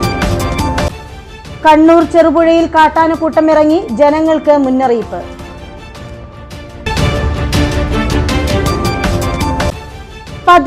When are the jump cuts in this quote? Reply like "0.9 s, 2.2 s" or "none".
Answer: none